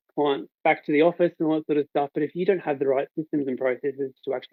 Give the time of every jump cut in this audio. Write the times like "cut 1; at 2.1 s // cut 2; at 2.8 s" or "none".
none